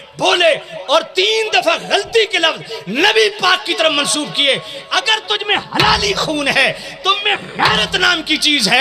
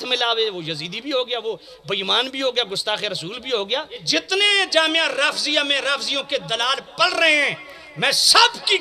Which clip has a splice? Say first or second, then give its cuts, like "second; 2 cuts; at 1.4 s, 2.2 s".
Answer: second; 1 cut; at 4.0 s